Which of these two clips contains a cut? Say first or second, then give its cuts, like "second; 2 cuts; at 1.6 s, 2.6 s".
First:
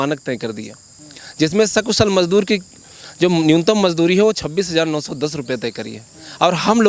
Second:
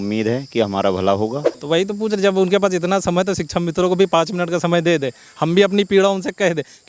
second; 1 cut; at 1.5 s